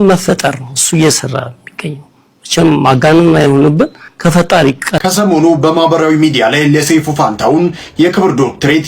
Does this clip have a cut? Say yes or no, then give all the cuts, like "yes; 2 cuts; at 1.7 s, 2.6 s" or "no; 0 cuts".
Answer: yes; 1 cut; at 5.0 s